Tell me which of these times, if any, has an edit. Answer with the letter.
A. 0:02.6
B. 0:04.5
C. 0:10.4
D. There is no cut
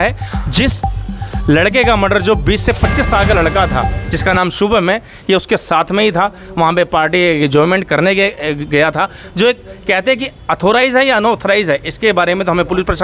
D